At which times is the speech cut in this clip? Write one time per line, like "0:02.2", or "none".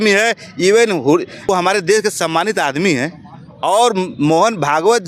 0:01.5